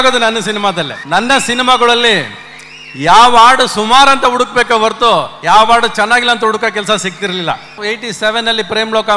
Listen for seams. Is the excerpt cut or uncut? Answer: cut